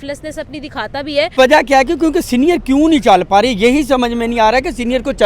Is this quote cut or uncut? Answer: cut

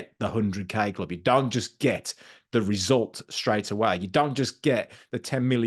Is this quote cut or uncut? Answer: uncut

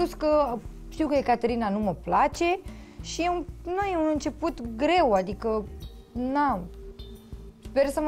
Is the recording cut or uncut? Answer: uncut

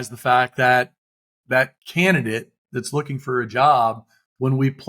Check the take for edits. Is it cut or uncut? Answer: cut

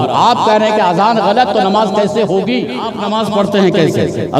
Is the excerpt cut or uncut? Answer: cut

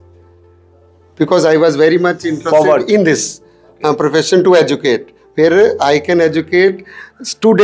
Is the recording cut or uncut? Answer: uncut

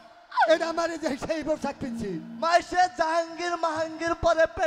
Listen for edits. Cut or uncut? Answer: uncut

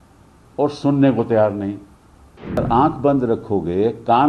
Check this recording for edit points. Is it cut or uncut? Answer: cut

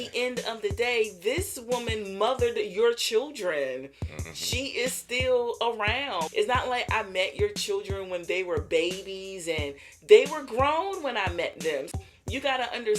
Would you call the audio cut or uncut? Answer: cut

